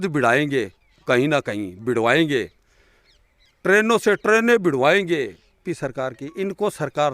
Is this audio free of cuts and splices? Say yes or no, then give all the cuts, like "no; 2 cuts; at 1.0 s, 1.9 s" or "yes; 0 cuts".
no; 1 cut; at 5.7 s